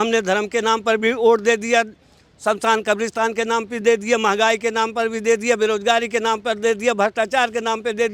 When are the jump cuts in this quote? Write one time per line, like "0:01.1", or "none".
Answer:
none

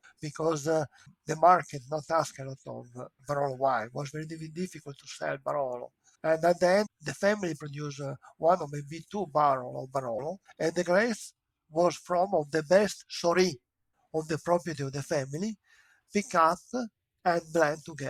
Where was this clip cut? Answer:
none

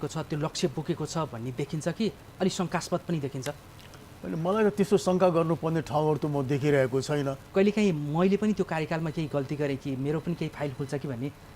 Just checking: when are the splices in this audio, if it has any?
0:07.4

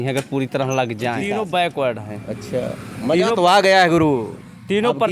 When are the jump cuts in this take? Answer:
0:01.2

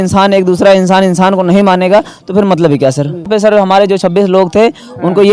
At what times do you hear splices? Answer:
0:03.3

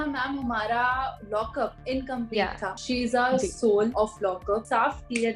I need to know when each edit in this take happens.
0:01.5
0:02.8
0:04.5

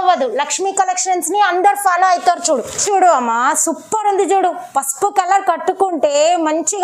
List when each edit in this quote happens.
0:02.8

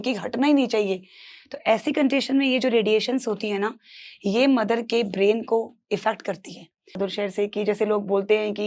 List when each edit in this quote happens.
0:07.0

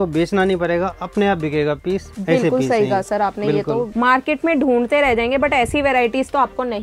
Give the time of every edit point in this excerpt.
0:03.9

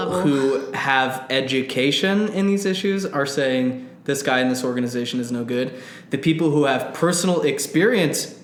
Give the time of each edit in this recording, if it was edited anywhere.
none

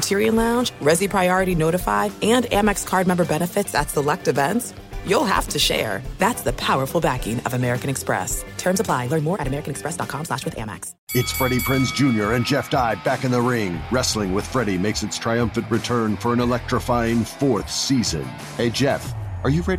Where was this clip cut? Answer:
0:10.9

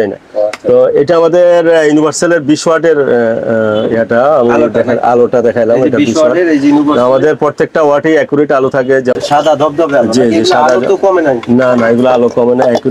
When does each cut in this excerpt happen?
0:09.1

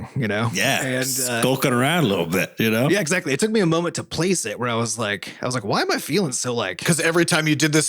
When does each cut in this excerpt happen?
0:02.9
0:06.8

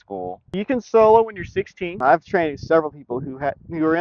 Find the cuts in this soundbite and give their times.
0:01.8

